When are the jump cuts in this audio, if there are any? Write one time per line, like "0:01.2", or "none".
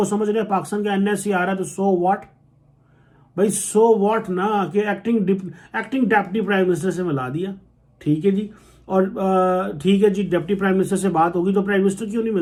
none